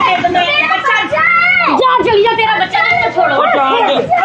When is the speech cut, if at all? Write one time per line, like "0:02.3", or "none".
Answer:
none